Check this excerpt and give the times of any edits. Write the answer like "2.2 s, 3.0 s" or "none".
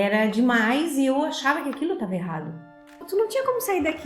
3.0 s